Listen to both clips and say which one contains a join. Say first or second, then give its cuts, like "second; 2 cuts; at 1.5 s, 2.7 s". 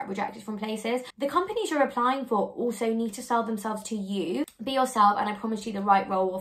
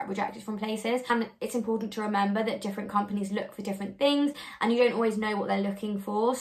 first; 2 cuts; at 1.0 s, 4.4 s